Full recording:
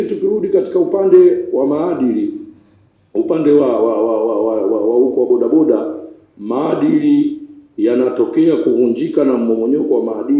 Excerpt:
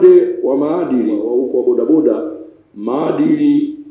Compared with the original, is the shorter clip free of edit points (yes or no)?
no